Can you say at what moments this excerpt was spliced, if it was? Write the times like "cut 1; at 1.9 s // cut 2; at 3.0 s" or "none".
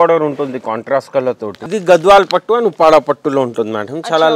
cut 1; at 1.6 s